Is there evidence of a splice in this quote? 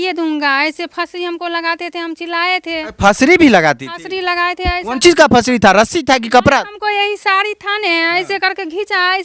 no; 0 cuts

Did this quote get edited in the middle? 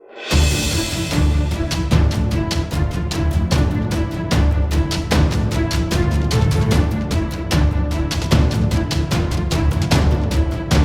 no; 0 cuts

